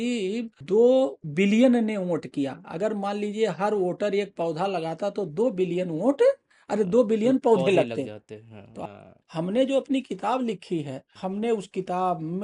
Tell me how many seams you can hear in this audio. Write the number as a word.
one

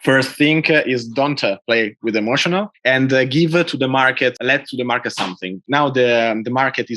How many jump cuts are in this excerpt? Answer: two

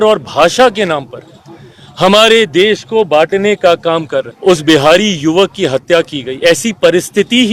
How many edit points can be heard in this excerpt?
one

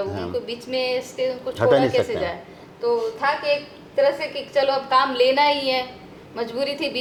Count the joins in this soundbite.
zero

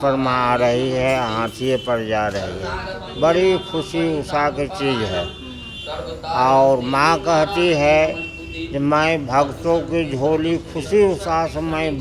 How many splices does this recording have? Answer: zero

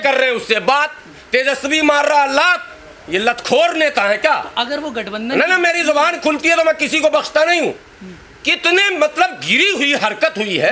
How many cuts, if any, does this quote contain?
zero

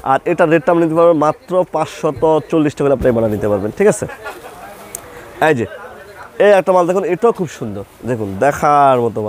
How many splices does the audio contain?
zero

